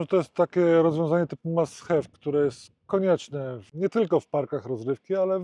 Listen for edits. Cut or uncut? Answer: uncut